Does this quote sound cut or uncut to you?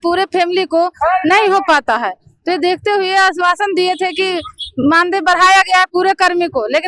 uncut